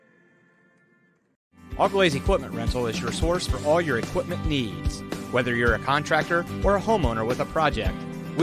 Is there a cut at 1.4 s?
yes; 1 cut; at 1.4 s

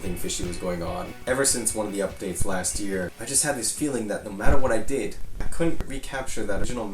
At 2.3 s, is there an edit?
no; 1 cut; at 5.9 s

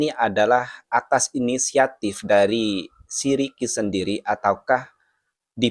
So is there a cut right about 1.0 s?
no; 0 cuts

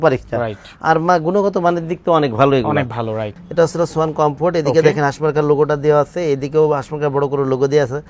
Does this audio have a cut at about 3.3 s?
yes; 1 cut; at 3.3 s

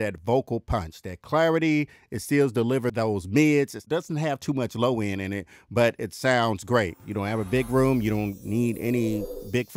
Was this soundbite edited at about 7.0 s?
yes; 3 cuts; at 2.9 s, 3.8 s, 7.0 s

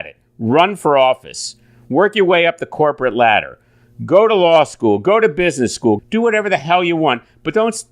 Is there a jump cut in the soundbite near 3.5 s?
no; 1 cut; at 6.0 s

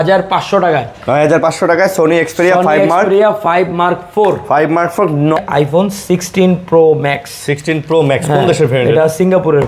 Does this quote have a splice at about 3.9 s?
no; 1 cut; at 5.4 s

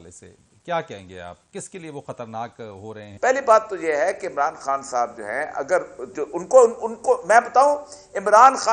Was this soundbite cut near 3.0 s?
yes; 1 cut; at 3.0 s

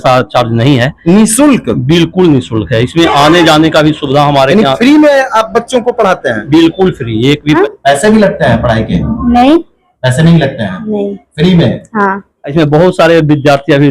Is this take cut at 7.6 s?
yes; 2 cuts; at 7.6 s, 12.5 s

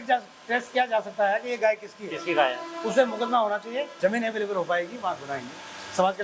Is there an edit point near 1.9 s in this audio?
no; 1 cut; at 3.9 s

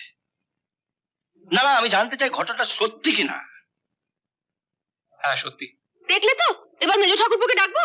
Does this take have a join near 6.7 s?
no; 0 cuts

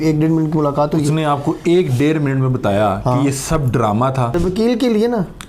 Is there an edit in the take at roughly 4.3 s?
yes; 1 cut; at 4.3 s

